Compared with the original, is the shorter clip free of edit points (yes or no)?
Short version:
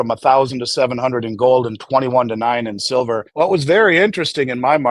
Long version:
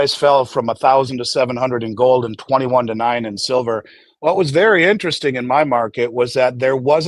no